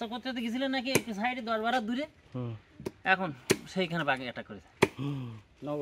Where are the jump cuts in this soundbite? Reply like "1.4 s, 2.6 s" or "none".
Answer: none